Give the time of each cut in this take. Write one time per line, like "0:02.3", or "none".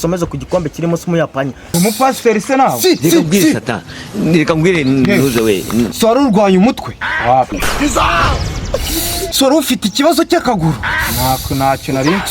0:01.7